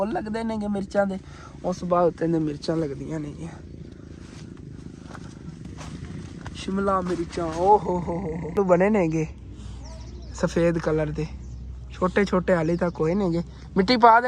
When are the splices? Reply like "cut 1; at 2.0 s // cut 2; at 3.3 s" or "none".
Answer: cut 1; at 8.6 s